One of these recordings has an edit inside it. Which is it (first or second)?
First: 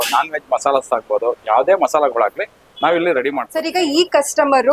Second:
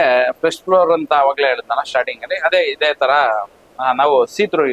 first